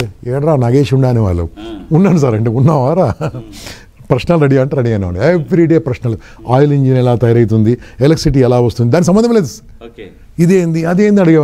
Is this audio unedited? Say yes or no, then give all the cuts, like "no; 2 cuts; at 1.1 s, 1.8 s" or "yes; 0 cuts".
yes; 0 cuts